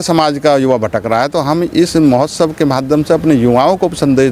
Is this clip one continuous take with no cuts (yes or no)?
yes